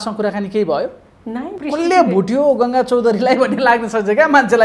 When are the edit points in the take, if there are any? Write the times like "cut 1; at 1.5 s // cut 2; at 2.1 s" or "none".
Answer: cut 1; at 1.5 s